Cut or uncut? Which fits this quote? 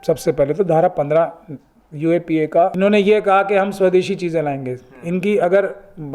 cut